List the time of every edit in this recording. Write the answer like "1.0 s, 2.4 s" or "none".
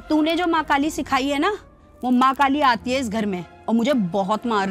none